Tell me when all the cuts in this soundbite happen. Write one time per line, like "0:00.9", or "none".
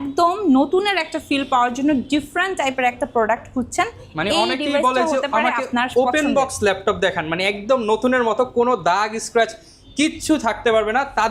none